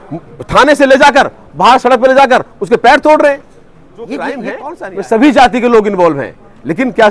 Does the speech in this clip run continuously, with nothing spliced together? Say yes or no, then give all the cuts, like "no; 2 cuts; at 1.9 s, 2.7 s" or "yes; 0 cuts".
no; 1 cut; at 4.5 s